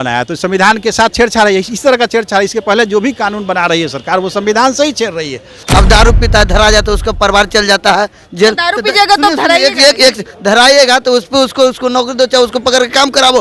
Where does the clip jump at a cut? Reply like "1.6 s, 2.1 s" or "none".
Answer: 5.6 s